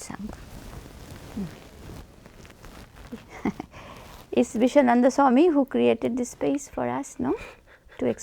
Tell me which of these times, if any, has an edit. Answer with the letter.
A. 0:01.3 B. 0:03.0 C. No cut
B